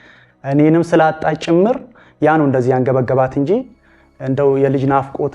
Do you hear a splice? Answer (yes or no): no